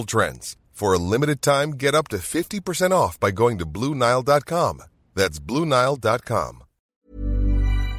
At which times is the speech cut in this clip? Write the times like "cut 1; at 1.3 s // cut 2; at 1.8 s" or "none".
cut 1; at 7.0 s